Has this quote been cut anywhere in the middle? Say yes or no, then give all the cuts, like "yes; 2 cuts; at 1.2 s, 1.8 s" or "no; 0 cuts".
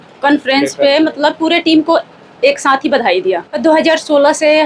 yes; 1 cut; at 3.5 s